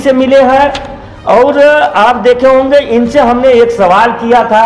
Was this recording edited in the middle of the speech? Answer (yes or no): no